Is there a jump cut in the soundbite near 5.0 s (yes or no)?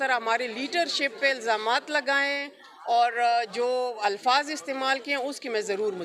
no